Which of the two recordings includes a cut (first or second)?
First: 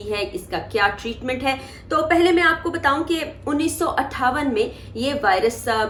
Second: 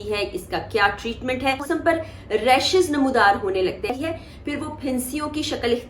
second